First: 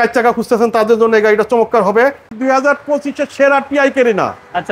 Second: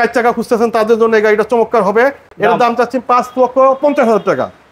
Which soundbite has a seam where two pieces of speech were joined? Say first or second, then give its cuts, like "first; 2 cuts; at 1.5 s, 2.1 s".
first; 1 cut; at 2.3 s